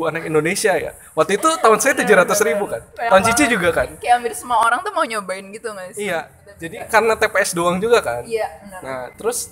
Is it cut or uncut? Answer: uncut